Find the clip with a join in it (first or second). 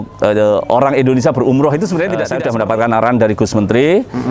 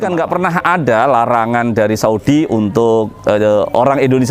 first